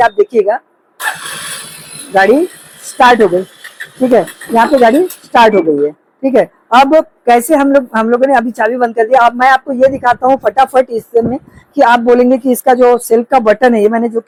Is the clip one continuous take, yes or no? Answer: yes